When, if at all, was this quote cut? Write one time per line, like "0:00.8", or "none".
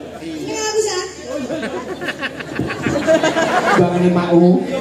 0:03.8